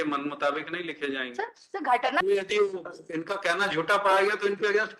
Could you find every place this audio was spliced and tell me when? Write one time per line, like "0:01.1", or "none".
0:02.2